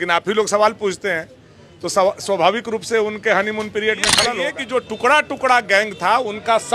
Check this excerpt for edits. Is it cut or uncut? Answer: cut